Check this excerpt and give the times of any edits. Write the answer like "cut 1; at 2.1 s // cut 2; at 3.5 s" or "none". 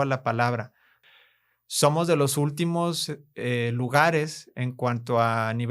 cut 1; at 1.0 s